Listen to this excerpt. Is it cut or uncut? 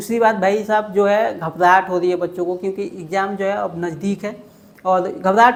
uncut